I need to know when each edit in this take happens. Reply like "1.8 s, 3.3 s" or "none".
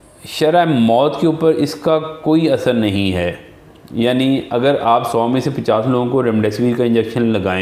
none